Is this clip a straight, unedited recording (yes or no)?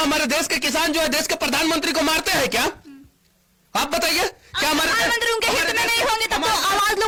yes